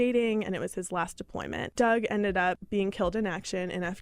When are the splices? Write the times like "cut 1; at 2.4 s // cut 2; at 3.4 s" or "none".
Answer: cut 1; at 1.6 s // cut 2; at 2.6 s